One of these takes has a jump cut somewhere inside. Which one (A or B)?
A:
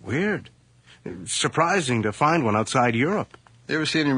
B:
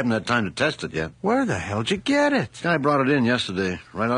A